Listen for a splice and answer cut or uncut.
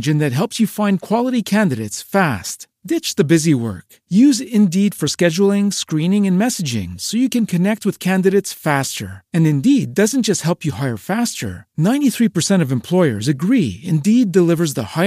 uncut